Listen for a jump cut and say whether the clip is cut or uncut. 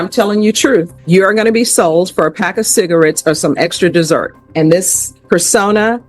cut